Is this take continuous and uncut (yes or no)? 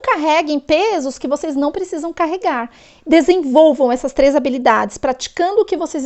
yes